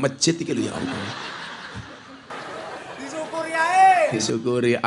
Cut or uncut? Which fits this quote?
uncut